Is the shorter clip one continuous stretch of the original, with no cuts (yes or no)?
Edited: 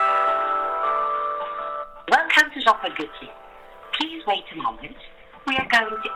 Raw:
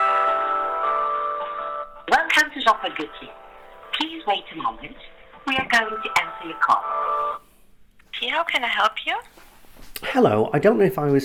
yes